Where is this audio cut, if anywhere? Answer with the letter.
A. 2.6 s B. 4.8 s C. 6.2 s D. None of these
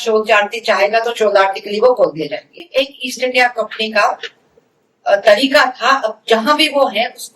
A